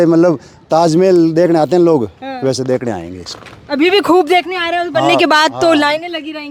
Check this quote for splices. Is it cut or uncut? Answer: uncut